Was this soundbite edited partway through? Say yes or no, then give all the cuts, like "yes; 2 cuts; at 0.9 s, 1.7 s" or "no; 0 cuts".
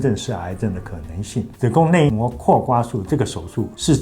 yes; 1 cut; at 1.5 s